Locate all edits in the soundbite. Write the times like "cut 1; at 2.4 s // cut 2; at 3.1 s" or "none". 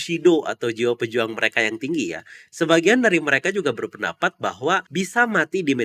none

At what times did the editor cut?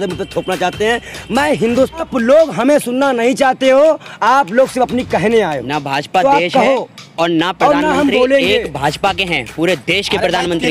cut 1; at 1.9 s

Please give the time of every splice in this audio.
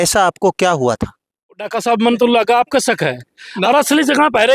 cut 1; at 1.5 s

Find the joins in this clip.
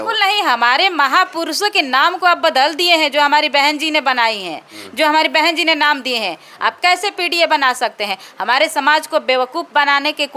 none

